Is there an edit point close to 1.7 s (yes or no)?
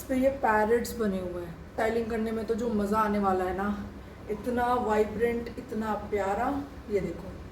yes